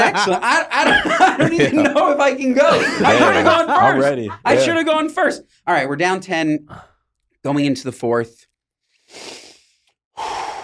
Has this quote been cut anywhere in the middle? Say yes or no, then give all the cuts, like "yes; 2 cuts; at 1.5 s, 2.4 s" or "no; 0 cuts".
no; 0 cuts